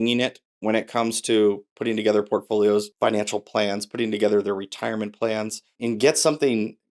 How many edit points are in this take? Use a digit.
2